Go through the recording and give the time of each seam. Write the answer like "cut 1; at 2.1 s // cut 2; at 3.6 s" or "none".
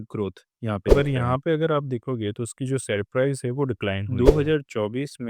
cut 1; at 0.9 s // cut 2; at 4.1 s